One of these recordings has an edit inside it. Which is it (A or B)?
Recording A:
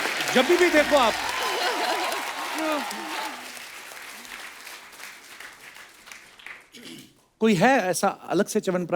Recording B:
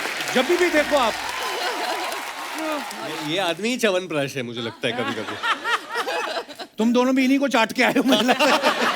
B